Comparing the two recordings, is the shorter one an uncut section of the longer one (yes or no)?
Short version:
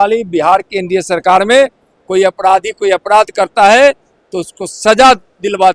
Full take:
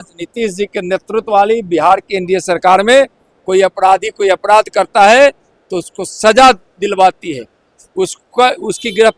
yes